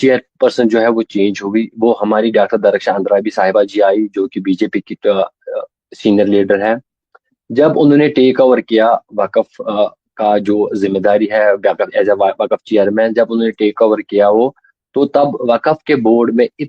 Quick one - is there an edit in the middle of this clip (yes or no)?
no